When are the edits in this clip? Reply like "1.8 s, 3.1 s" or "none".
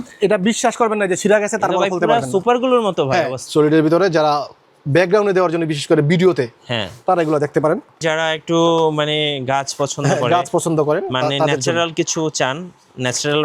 3.4 s, 8.0 s